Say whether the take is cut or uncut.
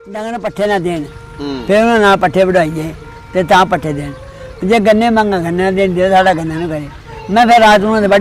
uncut